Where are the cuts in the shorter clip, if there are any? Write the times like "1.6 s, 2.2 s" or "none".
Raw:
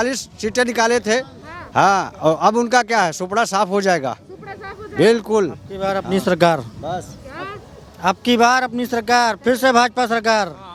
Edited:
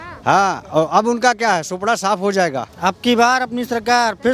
2.7 s